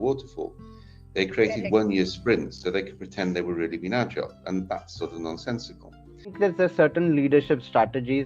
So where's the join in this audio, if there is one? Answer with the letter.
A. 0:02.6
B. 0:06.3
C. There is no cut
B